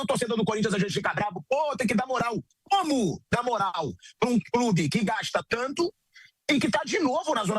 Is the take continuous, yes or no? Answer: yes